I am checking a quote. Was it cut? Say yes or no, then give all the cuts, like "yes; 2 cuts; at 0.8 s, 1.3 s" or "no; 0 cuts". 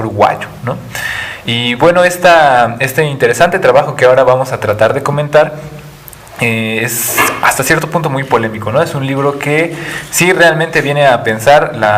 no; 0 cuts